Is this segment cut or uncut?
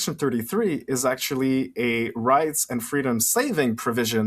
uncut